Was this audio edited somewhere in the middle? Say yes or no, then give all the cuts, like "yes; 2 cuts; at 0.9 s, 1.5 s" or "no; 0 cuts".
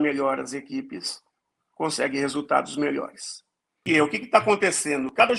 yes; 1 cut; at 3.8 s